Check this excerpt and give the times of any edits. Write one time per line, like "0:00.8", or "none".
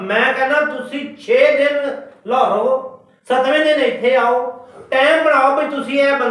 none